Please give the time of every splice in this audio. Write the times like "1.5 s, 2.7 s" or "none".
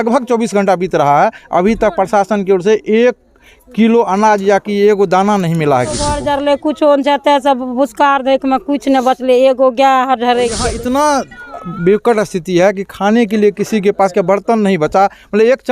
6.1 s, 10.7 s